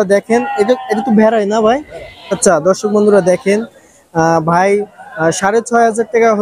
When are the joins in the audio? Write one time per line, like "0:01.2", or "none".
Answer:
0:02.4